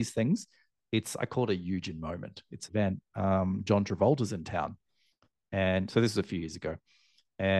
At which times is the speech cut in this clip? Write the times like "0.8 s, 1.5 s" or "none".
2.7 s